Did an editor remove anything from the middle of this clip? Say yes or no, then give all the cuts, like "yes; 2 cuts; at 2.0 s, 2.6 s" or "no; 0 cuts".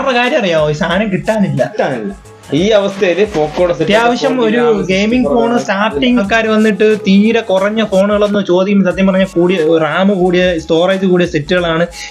yes; 1 cut; at 6.2 s